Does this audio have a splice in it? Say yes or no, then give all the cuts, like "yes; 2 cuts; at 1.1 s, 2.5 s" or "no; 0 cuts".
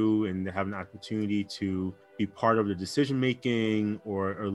no; 0 cuts